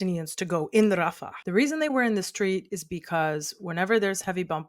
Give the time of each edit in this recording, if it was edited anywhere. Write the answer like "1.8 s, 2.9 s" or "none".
1.3 s